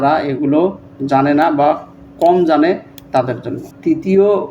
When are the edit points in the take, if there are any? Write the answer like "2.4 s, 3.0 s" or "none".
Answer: none